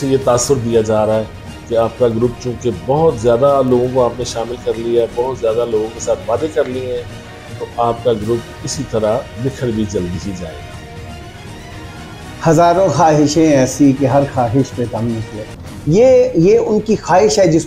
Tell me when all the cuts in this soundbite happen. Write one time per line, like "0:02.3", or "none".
none